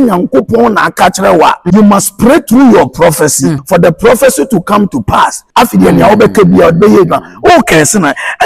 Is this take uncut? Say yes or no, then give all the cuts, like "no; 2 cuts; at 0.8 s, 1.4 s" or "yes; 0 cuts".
no; 3 cuts; at 1.6 s, 3.6 s, 5.4 s